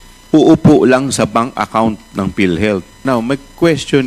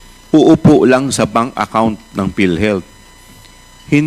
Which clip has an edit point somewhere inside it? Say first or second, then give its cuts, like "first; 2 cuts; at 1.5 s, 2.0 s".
first; 1 cut; at 3.0 s